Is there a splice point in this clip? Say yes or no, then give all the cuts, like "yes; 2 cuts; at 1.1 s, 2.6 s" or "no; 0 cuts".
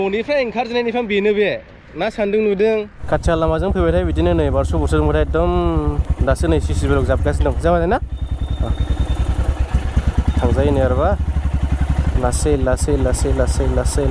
yes; 1 cut; at 3.0 s